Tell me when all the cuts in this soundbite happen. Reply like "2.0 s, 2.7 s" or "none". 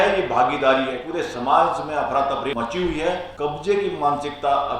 1.0 s, 2.5 s, 3.3 s